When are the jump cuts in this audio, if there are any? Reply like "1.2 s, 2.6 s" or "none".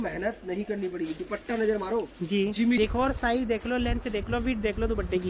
2.8 s